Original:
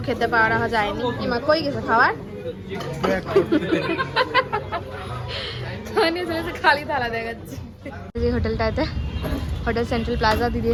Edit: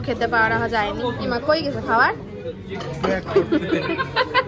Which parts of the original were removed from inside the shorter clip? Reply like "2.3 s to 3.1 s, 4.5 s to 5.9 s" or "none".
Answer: none